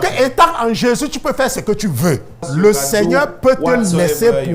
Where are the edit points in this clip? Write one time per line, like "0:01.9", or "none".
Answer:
0:02.4